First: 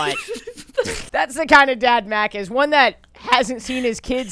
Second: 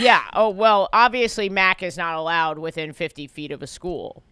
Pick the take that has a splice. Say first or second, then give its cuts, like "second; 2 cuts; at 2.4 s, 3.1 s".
first; 1 cut; at 1.0 s